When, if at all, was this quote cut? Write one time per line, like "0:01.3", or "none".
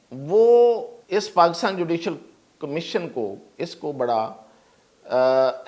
0:00.9
0:03.4